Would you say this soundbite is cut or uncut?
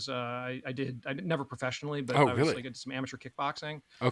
uncut